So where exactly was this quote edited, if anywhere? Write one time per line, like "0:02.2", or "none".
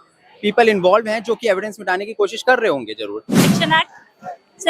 0:03.4